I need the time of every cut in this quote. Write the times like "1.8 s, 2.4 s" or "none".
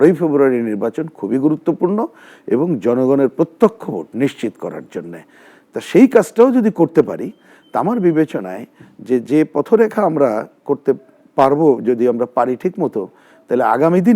none